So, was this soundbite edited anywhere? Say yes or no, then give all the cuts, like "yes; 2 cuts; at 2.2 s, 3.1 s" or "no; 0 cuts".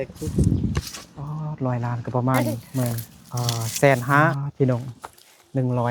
yes; 1 cut; at 4.4 s